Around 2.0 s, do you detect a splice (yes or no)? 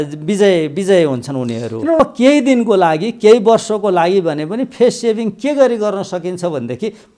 yes